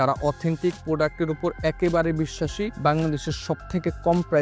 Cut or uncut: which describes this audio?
cut